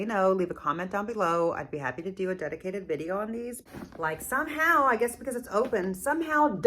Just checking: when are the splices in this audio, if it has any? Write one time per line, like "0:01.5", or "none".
0:03.6